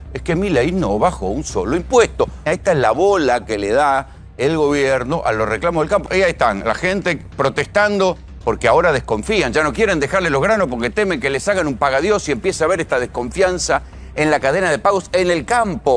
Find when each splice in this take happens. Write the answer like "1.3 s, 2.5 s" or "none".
2.4 s, 6.0 s, 8.3 s